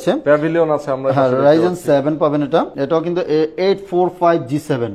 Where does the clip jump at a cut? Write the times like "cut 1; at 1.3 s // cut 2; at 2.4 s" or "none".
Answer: cut 1; at 2.7 s